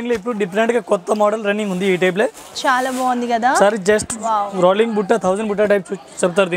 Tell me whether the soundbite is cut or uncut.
uncut